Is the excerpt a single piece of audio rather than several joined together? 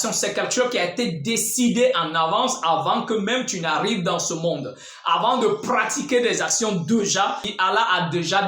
no; 1 cut; at 7.5 s

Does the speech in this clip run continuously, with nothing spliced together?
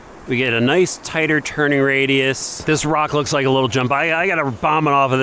no; 1 cut; at 2.5 s

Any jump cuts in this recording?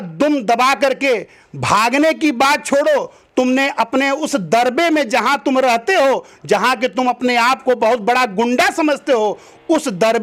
no; 0 cuts

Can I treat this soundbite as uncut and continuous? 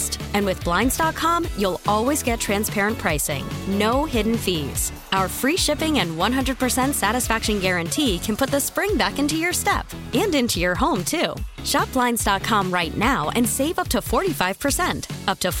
yes; 0 cuts

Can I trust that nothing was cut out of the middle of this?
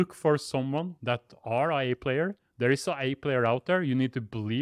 yes; 0 cuts

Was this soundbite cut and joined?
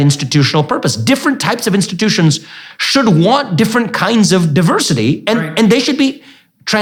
no; 0 cuts

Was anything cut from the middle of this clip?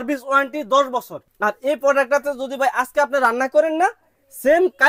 yes; 1 cut; at 1.2 s

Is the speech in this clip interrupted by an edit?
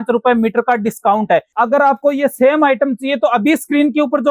yes; 1 cut; at 1.5 s

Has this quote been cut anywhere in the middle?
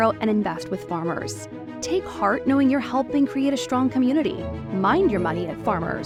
no; 0 cuts

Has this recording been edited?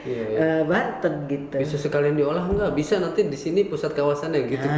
no; 0 cuts

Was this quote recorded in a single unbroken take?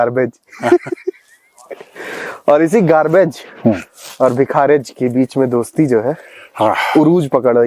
yes; 0 cuts

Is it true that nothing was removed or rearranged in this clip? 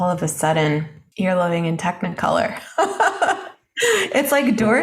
no; 1 cut; at 1.0 s

